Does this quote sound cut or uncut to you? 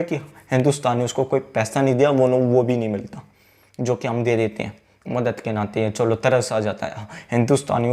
uncut